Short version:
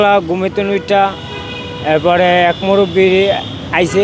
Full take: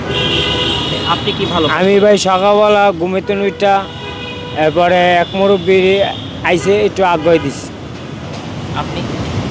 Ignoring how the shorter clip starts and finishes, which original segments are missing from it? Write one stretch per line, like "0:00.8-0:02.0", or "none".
none